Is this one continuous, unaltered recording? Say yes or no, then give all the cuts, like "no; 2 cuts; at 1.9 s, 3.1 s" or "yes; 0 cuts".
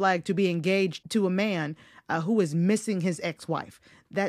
no; 1 cut; at 1.0 s